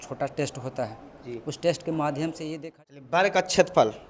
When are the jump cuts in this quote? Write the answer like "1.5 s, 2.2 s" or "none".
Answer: 2.5 s

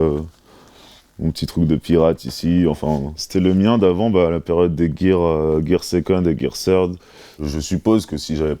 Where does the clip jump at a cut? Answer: 7.3 s

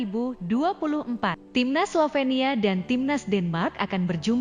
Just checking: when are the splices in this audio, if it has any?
1.4 s

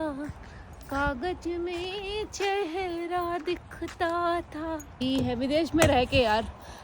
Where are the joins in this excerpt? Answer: 5.0 s

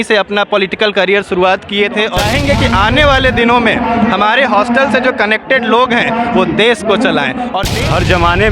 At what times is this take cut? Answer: 2.2 s, 7.7 s

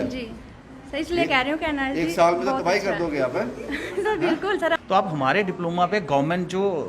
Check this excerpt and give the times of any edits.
4.8 s

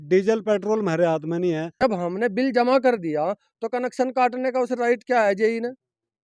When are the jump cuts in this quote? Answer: 1.7 s

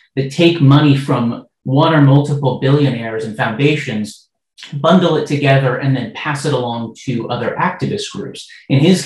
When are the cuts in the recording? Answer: none

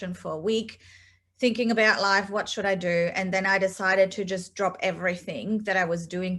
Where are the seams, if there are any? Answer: none

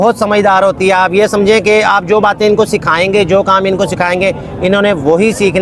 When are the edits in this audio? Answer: none

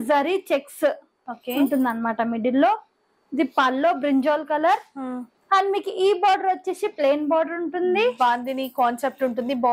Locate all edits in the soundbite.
none

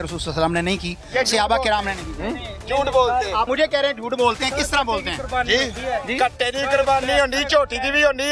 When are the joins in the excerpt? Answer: 3.5 s

